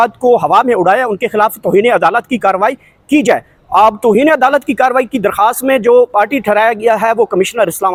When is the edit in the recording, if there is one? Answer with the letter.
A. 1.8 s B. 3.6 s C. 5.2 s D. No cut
D